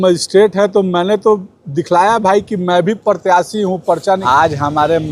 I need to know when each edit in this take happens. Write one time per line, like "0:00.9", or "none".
0:04.2